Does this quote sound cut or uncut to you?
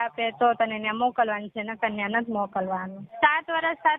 cut